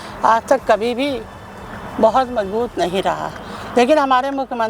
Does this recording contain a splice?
no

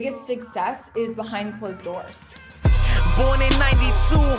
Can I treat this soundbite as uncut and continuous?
no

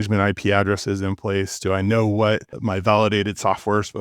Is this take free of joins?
no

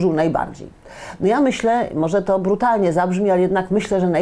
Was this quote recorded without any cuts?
yes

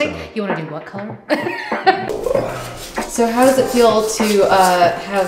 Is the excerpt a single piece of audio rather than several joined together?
no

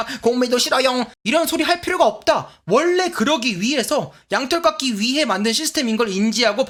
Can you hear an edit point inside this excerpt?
no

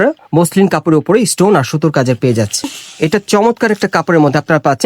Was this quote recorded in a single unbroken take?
no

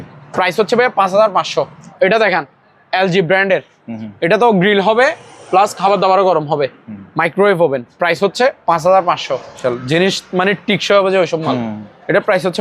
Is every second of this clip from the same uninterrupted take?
no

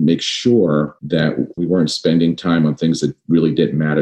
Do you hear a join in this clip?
yes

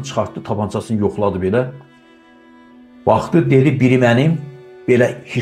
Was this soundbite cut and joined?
no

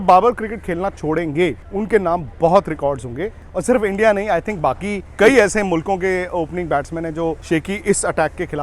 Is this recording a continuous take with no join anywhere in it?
no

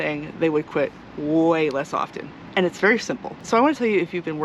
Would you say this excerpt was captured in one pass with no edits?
no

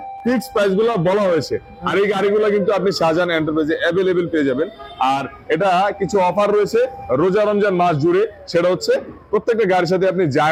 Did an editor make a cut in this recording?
no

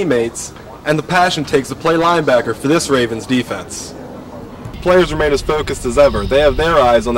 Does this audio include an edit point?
yes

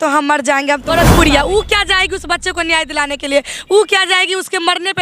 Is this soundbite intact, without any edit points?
no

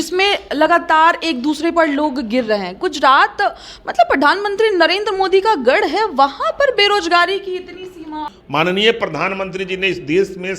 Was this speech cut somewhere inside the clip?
yes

